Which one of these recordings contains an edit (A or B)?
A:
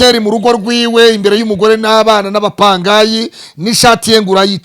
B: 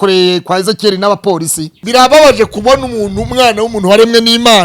B